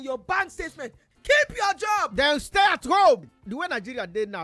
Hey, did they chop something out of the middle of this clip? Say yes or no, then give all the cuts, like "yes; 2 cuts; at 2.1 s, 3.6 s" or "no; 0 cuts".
yes; 2 cuts; at 1.0 s, 3.2 s